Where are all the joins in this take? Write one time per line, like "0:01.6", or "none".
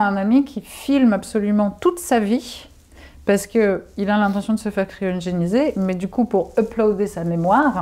none